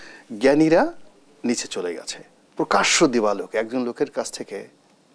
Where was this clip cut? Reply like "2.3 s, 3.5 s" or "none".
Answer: 2.4 s